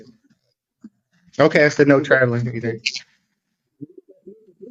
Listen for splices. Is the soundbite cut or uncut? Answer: uncut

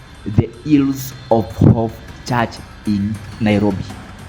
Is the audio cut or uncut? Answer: cut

